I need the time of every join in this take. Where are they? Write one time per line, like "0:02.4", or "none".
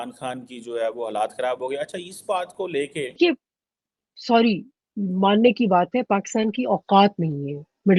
0:03.2